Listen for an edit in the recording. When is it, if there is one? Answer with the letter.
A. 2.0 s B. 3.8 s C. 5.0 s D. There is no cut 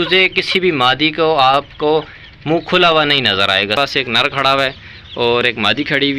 B